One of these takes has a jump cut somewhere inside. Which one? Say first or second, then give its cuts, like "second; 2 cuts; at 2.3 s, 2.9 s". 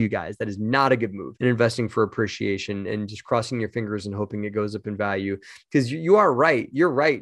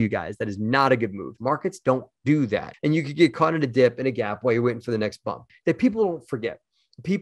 second; 3 cuts; at 1.3 s, 2.7 s, 5.5 s